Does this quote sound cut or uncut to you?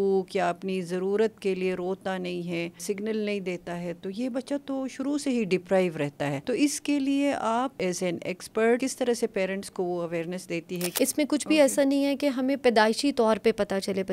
cut